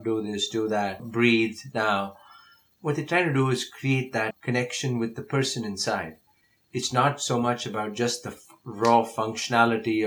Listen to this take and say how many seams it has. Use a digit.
0